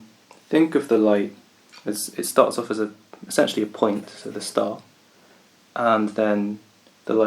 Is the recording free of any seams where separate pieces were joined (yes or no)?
yes